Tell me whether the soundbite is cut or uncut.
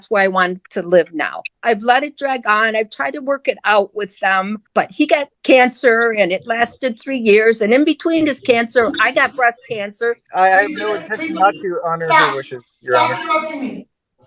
cut